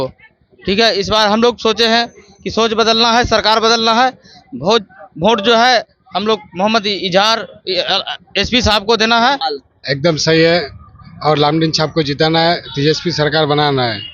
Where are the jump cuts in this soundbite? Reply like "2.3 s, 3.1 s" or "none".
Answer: 9.4 s